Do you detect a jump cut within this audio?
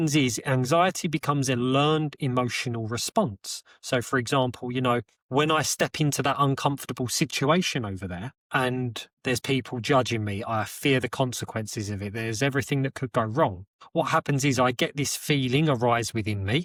no; 0 cuts

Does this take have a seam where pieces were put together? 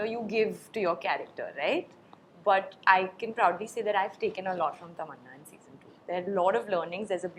no; 0 cuts

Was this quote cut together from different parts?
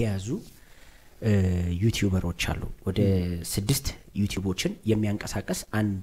no; 0 cuts

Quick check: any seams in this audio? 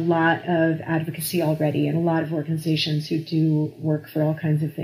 no; 0 cuts

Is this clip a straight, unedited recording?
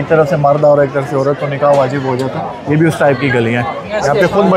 yes; 0 cuts

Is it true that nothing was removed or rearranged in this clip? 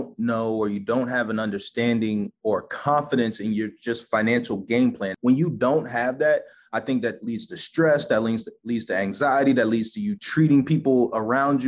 no; 2 cuts; at 5.1 s, 10.2 s

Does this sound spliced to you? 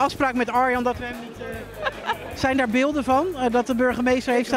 yes; 1 cut; at 2.3 s

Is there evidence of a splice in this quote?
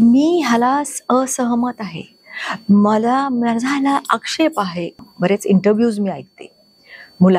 yes; 1 cut; at 5.0 s

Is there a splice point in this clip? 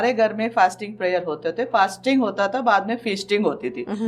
no; 0 cuts

